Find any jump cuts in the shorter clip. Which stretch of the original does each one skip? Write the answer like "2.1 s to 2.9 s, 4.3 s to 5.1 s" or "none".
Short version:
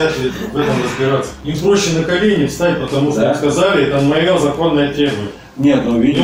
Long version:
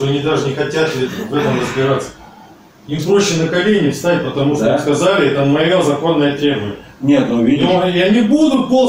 2.1 s to 2.8 s